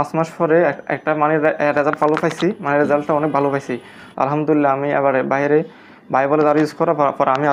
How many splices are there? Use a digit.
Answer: 0